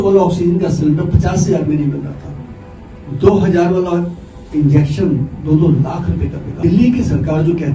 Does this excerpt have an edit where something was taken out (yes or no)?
yes